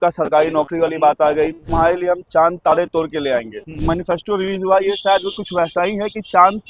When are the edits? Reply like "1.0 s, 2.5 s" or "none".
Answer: 1.6 s, 3.8 s